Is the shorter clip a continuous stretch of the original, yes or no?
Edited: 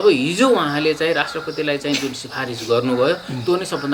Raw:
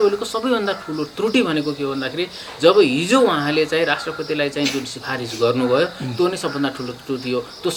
yes